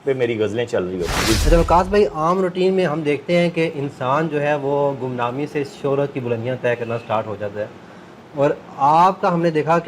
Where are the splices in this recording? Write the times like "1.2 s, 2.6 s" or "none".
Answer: 1.4 s